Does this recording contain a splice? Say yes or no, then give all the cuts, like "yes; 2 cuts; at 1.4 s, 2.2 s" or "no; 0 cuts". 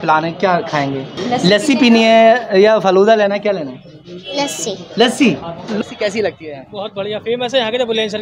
yes; 2 cuts; at 1.1 s, 5.8 s